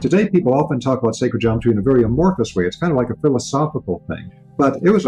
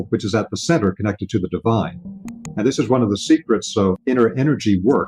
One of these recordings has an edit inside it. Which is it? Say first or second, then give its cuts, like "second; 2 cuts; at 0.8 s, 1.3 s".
second; 2 cuts; at 2.1 s, 4.0 s